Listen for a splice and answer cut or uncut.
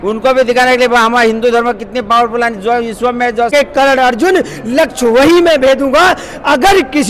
cut